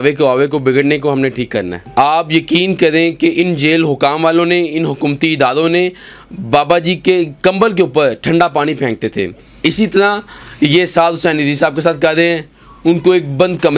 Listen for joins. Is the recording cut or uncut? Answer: cut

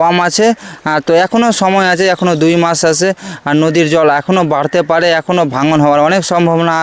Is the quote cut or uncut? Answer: uncut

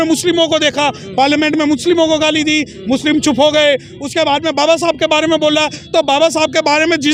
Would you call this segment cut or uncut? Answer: uncut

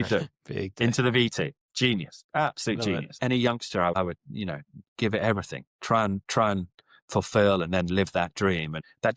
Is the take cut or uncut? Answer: cut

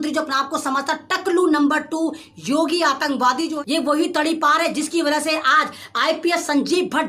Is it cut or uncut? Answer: cut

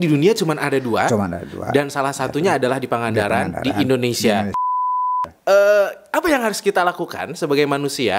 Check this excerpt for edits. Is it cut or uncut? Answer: cut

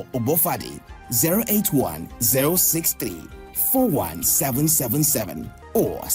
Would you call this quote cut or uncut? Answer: cut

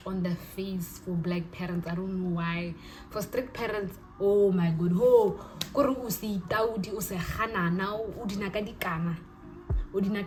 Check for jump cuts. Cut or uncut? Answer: uncut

